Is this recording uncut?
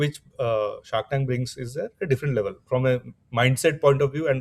yes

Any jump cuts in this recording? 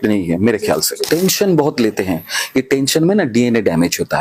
yes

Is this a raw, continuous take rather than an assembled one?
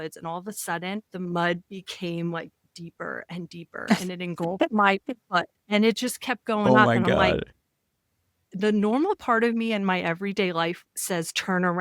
no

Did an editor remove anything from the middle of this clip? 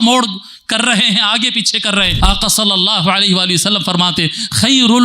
yes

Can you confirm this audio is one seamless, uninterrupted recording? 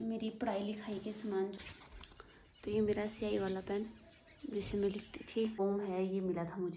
no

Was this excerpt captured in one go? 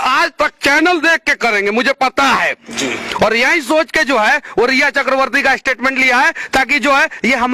yes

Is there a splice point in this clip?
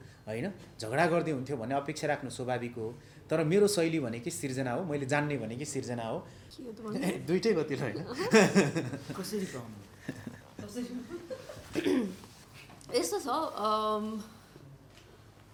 no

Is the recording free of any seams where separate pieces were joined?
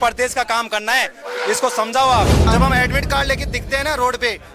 no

